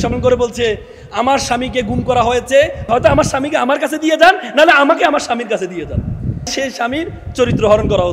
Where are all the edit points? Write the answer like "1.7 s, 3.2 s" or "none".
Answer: 2.8 s, 6.5 s